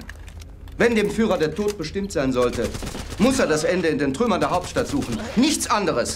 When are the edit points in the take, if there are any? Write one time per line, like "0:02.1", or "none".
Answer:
none